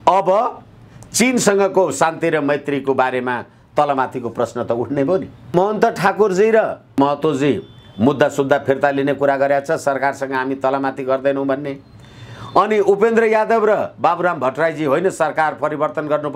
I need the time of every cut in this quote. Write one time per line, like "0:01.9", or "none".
0:05.5
0:07.0